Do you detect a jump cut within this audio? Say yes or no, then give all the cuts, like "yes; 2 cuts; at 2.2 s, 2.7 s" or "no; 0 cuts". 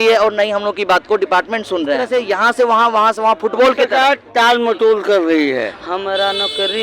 yes; 2 cuts; at 2.0 s, 5.8 s